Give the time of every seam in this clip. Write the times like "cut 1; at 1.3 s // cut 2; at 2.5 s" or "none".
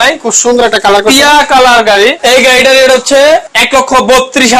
cut 1; at 2.2 s // cut 2; at 3.6 s